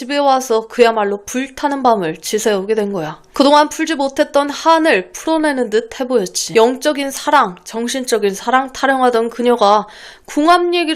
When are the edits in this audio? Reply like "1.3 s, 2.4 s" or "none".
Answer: 3.2 s, 6.4 s